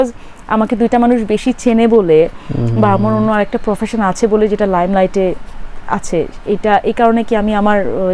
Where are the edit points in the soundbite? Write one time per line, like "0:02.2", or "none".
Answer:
none

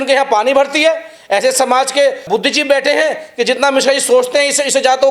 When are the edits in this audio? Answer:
0:02.3

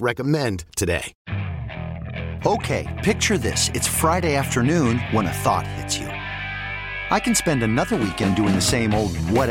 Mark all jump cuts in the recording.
0:01.1

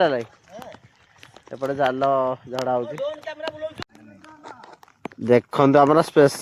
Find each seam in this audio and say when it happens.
0:03.8

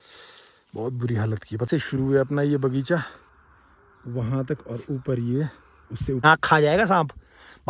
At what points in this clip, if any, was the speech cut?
0:01.7
0:06.2

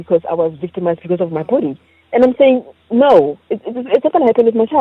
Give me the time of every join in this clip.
none

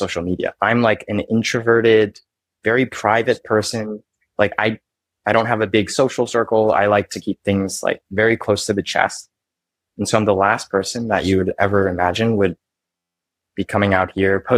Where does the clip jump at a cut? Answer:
none

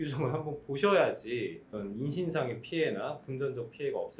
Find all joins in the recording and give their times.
0:01.7

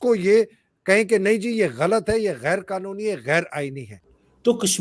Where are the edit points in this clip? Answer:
none

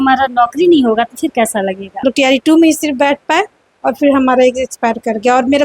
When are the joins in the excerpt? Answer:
0:02.0

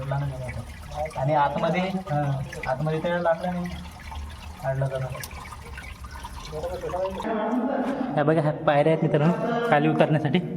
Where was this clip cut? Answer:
0:07.2

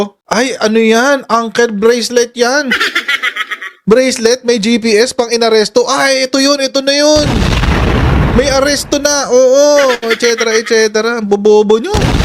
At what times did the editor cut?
0:03.7

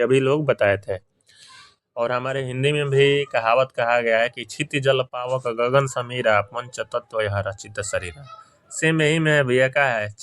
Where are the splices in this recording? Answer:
none

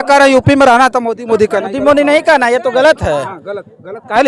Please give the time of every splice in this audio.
none

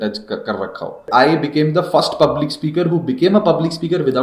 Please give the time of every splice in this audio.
0:01.1

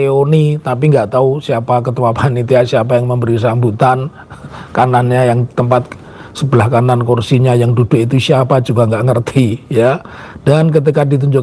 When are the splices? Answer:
none

